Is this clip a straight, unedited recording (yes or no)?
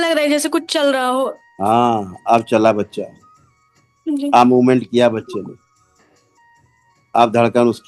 no